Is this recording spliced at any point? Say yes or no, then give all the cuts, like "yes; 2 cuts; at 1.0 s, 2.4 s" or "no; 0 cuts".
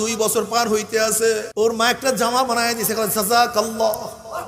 yes; 1 cut; at 1.5 s